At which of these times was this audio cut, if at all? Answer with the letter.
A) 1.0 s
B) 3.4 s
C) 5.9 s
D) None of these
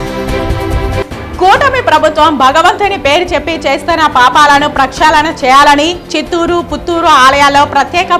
D